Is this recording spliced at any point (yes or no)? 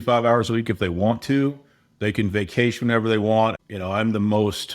yes